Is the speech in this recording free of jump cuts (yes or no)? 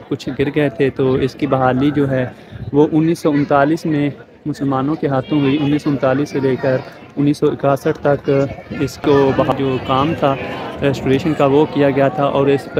no